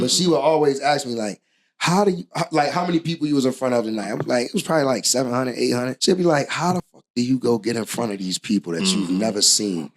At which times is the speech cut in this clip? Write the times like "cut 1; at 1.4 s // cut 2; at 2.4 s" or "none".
cut 1; at 5.9 s